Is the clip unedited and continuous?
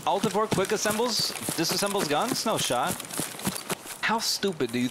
no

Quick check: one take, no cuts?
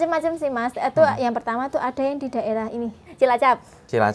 no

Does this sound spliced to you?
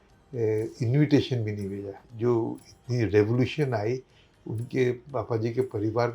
yes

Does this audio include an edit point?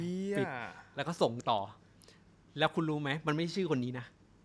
no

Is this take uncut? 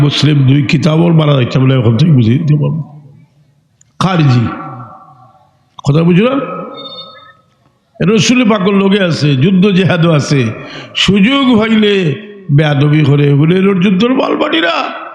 yes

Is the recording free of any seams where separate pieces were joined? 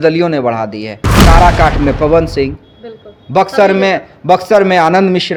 yes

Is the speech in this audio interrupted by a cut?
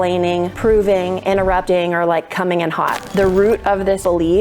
yes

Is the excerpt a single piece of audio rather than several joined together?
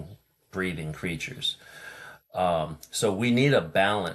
yes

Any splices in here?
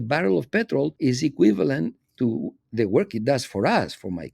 yes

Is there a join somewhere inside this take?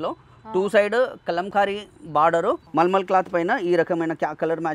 yes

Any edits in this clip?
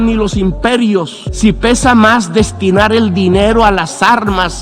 yes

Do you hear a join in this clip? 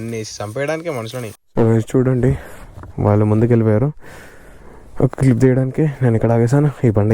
yes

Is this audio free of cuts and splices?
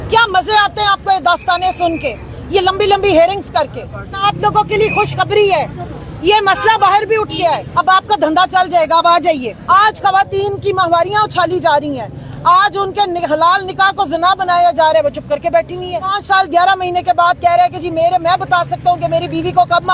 no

